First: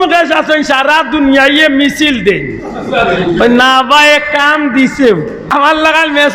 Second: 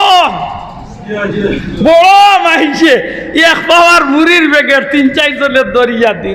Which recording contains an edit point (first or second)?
first